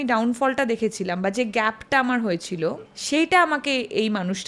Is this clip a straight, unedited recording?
no; 1 cut; at 2.8 s

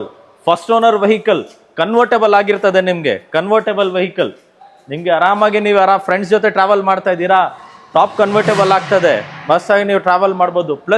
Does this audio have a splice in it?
no; 0 cuts

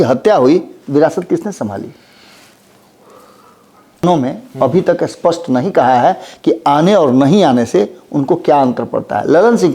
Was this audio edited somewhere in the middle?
yes; 1 cut; at 4.0 s

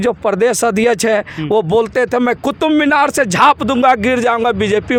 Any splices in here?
no; 0 cuts

